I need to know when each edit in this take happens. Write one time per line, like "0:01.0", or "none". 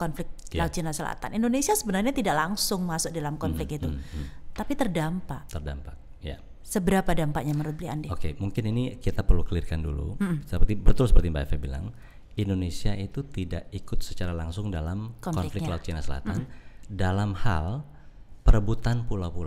none

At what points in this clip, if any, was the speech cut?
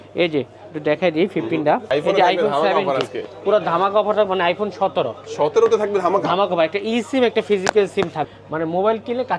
0:01.9
0:08.3

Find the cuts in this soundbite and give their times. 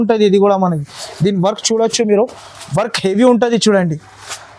none

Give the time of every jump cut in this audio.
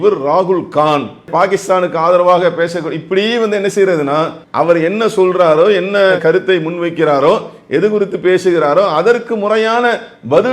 0:01.3
0:04.4

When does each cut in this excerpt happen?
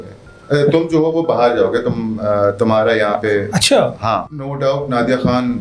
0:04.5

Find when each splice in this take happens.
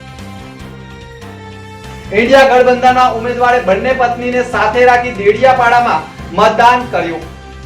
0:01.3

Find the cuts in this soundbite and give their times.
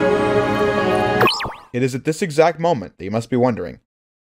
0:01.2

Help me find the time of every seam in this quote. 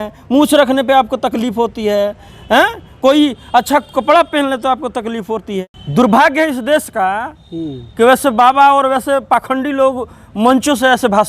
0:05.6

